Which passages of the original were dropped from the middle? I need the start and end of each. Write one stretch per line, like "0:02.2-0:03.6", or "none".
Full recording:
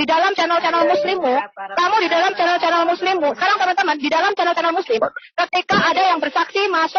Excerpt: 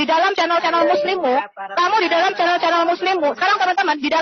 none

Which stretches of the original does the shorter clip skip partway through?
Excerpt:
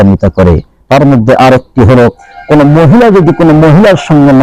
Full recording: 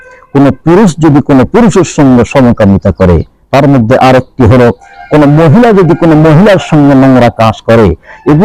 none

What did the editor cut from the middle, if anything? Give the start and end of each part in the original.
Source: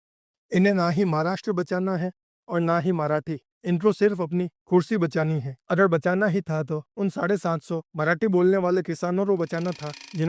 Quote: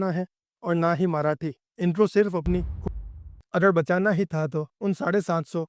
0:04.7-0:05.0

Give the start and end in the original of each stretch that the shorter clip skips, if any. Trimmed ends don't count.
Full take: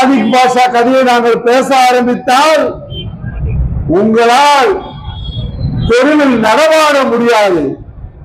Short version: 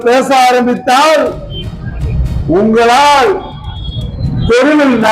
none

